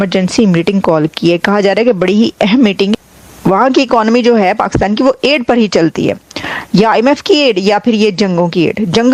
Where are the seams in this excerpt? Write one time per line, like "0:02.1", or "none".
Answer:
none